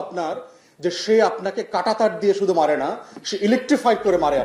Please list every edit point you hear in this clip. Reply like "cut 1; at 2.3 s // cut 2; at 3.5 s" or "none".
none